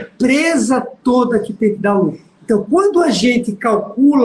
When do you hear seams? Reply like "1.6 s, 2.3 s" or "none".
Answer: none